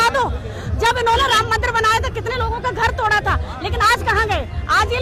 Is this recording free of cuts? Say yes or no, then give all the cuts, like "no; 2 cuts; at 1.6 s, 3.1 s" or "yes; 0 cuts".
yes; 0 cuts